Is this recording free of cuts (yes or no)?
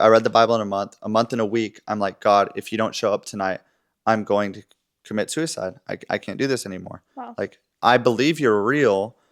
yes